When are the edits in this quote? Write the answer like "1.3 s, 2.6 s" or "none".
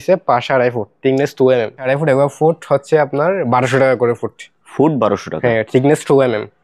1.9 s